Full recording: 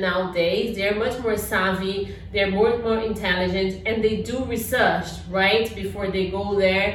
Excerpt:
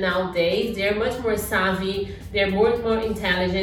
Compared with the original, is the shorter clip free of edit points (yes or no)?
yes